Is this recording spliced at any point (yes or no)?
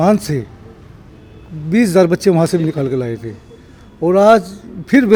no